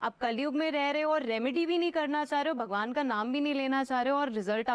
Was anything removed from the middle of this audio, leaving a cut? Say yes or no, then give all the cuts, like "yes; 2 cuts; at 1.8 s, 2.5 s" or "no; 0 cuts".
no; 0 cuts